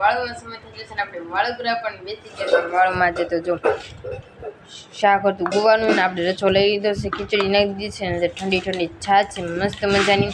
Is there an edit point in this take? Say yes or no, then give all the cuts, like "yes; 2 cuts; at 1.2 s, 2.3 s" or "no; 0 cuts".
no; 0 cuts